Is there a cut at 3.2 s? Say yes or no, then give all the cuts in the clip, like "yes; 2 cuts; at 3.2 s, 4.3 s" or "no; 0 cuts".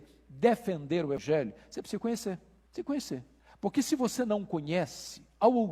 no; 1 cut; at 1.2 s